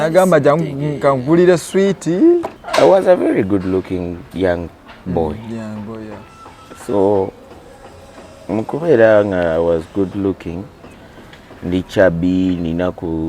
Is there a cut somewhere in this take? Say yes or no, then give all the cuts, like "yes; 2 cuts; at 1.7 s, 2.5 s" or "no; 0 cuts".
yes; 1 cut; at 2.6 s